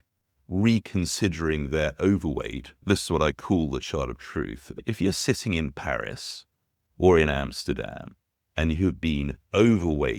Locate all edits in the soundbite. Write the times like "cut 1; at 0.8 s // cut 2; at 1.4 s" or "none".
cut 1; at 2.8 s // cut 2; at 4.8 s